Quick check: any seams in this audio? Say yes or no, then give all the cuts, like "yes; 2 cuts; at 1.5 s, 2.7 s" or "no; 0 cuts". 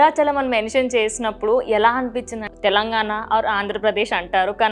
yes; 1 cut; at 2.4 s